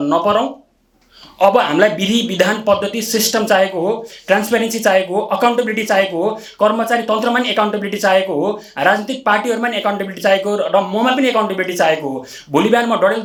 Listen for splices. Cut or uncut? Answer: uncut